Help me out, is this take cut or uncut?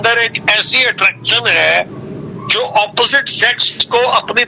uncut